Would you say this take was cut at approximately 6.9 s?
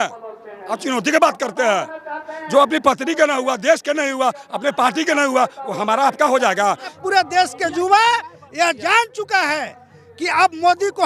yes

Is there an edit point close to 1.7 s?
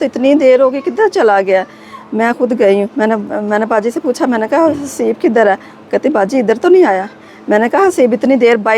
no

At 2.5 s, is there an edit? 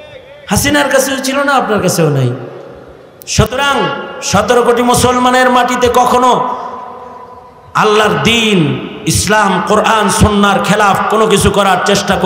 no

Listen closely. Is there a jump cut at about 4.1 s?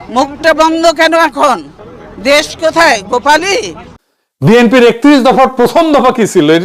yes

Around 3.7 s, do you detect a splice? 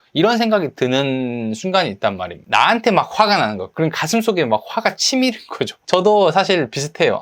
no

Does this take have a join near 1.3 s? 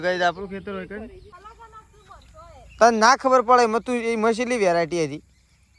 yes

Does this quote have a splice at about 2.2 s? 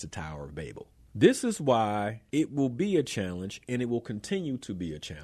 yes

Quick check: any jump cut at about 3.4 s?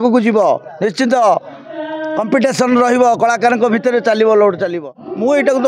no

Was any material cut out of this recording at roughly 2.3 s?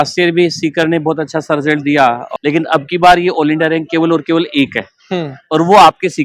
yes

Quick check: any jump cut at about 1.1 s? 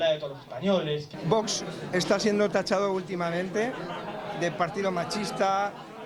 yes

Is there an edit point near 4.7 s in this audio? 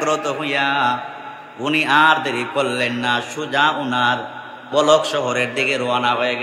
yes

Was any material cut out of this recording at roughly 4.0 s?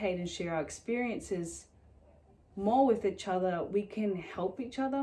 no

